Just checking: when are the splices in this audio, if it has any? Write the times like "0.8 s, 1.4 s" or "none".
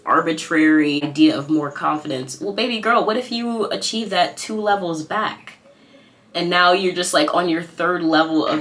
1.1 s